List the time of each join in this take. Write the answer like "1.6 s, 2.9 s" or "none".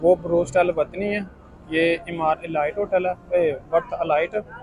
none